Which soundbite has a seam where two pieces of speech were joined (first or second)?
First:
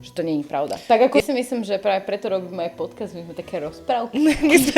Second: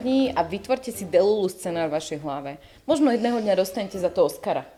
first